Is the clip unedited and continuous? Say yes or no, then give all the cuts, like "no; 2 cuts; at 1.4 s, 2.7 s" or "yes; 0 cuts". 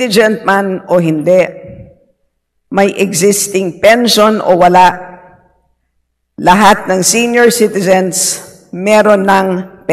yes; 0 cuts